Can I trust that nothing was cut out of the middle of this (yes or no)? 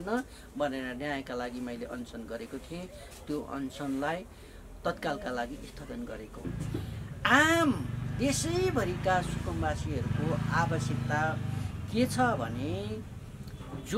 no